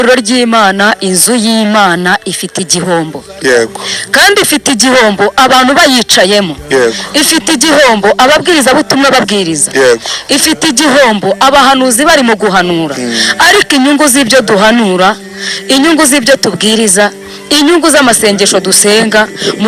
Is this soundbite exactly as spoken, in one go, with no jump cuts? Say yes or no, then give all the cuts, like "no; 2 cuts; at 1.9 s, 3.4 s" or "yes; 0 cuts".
yes; 0 cuts